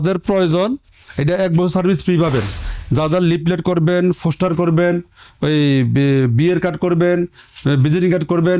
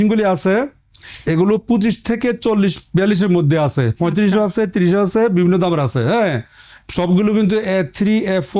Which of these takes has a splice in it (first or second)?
first